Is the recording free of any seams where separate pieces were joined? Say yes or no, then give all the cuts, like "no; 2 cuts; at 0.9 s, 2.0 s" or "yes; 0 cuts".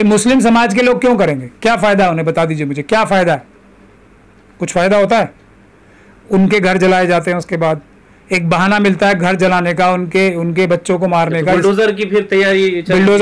yes; 0 cuts